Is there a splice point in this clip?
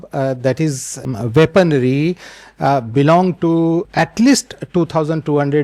yes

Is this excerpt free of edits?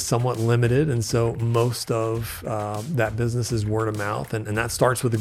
yes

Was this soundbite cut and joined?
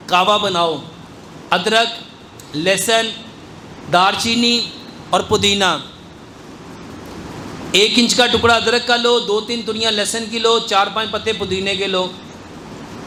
no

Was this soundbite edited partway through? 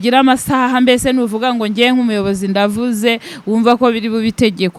no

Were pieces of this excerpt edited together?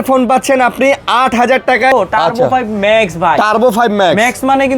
yes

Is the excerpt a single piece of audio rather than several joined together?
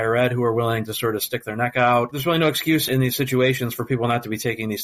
no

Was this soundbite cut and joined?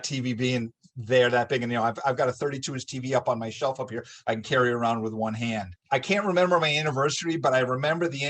yes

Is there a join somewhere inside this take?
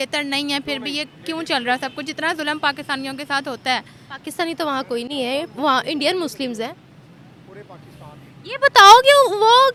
no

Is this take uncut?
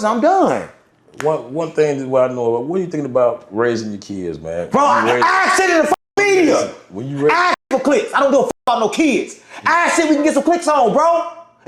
yes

